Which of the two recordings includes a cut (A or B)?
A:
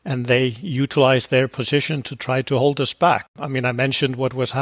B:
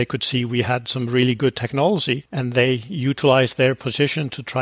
A